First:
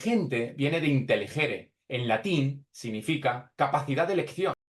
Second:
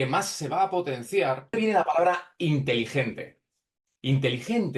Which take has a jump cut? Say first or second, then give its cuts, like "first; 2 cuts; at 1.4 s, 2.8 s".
second; 1 cut; at 1.5 s